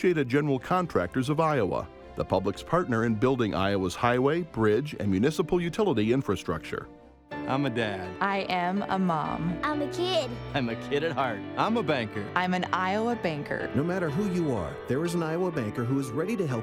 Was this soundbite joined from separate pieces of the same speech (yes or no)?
no